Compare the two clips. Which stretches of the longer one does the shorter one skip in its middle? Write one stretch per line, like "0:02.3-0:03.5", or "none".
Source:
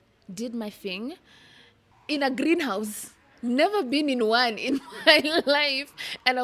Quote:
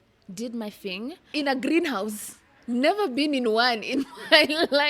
0:01.2-0:02.0